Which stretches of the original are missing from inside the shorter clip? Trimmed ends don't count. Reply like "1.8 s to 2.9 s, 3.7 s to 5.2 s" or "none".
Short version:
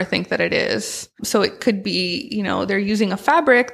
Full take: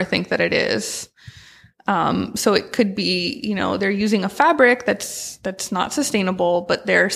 1.2 s to 2.3 s

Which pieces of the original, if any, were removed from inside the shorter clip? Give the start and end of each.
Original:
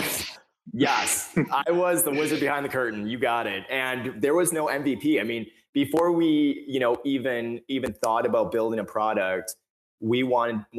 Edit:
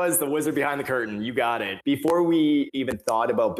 3.6 s to 5.6 s, 6.6 s to 7.7 s

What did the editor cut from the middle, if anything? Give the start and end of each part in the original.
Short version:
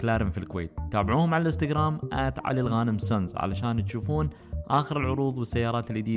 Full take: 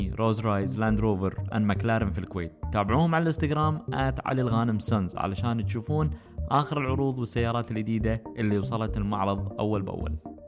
none

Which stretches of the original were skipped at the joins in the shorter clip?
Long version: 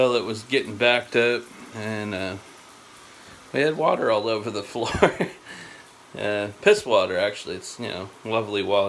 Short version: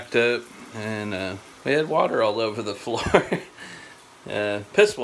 2.5 s to 3.3 s

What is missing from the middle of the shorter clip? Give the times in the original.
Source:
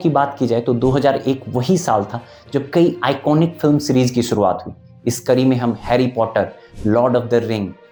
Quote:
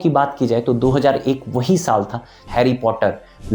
2.4 s to 5.8 s

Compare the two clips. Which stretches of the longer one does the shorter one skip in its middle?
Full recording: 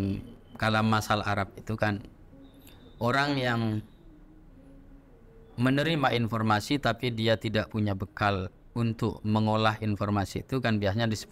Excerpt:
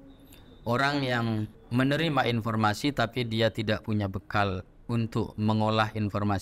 3.9 s to 5.4 s

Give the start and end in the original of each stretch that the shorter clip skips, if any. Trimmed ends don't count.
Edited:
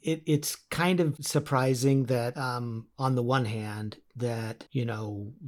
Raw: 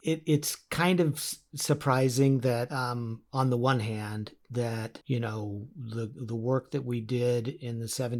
1.2 s to 1.6 s

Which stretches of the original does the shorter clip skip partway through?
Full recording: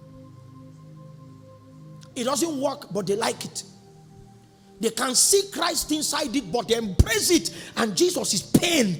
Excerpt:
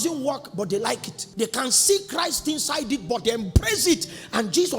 3.5 s to 4.6 s

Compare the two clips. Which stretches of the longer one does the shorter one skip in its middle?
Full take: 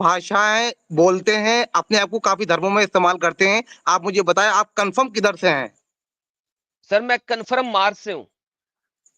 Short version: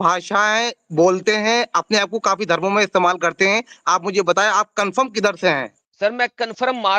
5.8 s to 6.7 s

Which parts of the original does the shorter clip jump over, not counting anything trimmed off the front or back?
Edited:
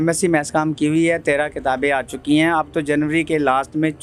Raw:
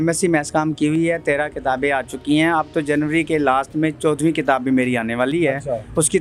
none

